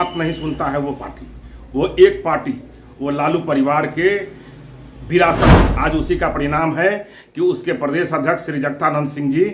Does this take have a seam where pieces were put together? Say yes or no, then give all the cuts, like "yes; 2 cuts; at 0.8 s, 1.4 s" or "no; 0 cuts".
yes; 1 cut; at 5.7 s